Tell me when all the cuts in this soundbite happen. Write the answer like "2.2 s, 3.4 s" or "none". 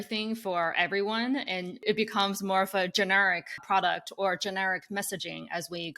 1.8 s, 3.6 s